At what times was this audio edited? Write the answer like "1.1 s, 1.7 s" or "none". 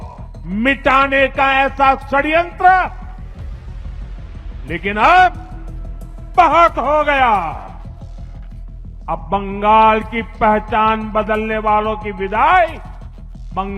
3.0 s, 4.4 s